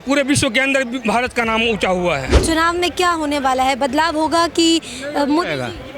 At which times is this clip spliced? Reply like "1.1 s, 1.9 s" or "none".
2.3 s